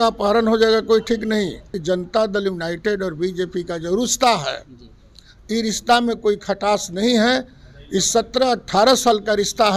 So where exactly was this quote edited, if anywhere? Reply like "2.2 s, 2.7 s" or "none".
1.7 s